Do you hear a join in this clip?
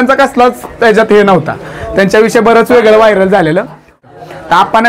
yes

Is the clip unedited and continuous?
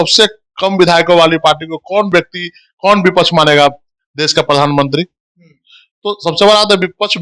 yes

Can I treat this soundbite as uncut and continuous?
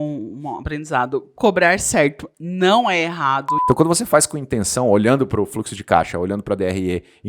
no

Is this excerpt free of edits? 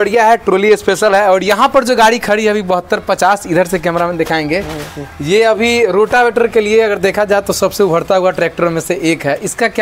yes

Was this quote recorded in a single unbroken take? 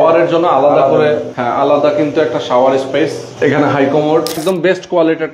no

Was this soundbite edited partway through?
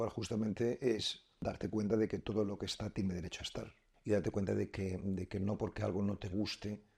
yes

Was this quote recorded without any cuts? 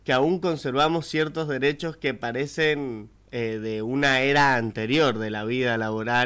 yes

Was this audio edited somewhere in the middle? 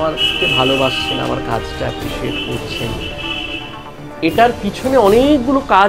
no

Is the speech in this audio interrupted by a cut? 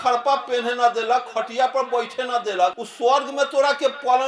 yes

